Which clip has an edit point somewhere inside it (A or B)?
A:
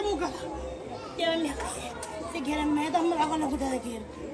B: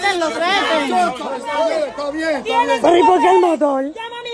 B